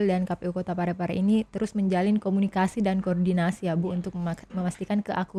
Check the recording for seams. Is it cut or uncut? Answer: uncut